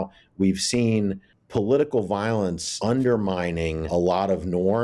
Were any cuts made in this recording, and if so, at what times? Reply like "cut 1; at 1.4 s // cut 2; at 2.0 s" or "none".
cut 1; at 1.3 s // cut 2; at 2.7 s // cut 3; at 3.9 s

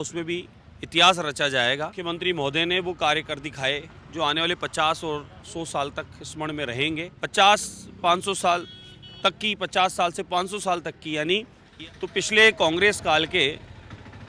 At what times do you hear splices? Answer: cut 1; at 2.0 s // cut 2; at 7.1 s // cut 3; at 11.6 s

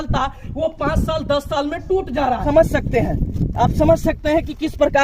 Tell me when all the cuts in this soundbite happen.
cut 1; at 2.4 s

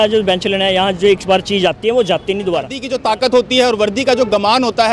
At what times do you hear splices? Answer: cut 1; at 2.8 s

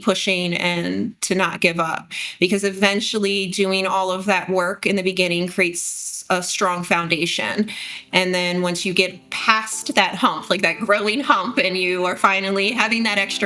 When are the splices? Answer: none

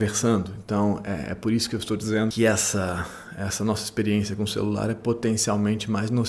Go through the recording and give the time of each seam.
cut 1; at 2.3 s

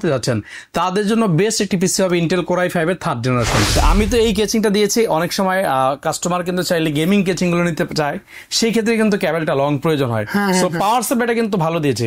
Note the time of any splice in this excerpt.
cut 1; at 3.7 s

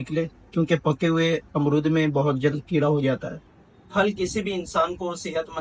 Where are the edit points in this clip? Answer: none

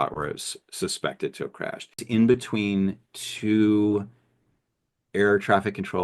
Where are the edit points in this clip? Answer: cut 1; at 2.0 s

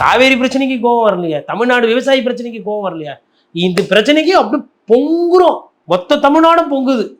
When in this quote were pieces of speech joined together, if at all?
cut 1; at 5.7 s

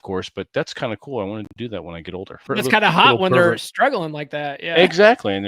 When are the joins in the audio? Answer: cut 1; at 2.4 s

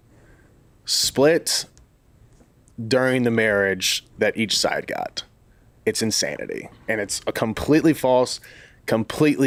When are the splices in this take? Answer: none

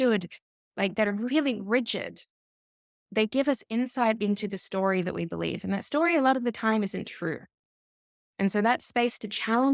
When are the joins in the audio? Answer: none

